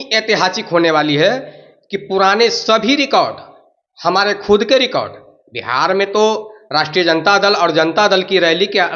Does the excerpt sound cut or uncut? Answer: uncut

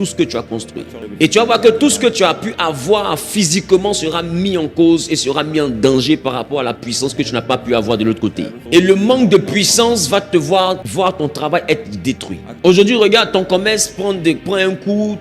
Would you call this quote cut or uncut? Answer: cut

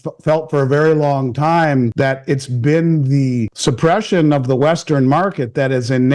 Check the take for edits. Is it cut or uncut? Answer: cut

